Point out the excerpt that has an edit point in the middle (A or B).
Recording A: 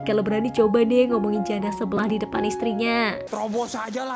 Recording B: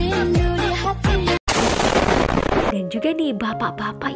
B